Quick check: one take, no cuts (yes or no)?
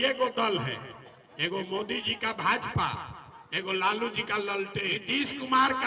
no